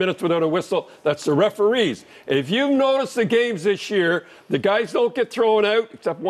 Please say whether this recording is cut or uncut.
uncut